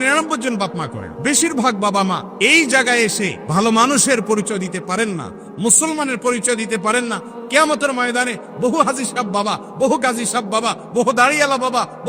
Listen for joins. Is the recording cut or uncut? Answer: cut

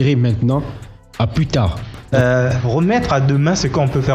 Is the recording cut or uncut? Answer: cut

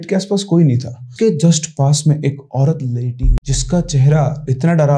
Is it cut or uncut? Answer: cut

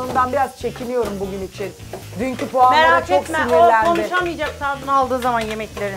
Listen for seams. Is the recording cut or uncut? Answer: uncut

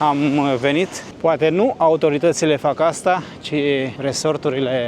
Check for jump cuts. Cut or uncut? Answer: cut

